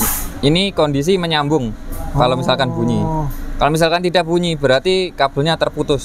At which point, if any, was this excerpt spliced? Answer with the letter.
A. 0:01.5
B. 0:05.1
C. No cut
C